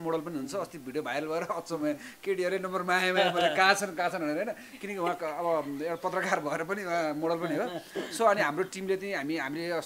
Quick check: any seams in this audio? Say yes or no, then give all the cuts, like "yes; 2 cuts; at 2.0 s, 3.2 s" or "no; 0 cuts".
no; 0 cuts